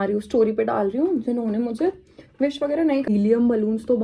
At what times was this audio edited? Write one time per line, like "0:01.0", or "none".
0:03.1